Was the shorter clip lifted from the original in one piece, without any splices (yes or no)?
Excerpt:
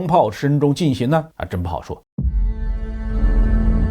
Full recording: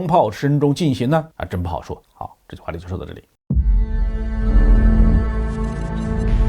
no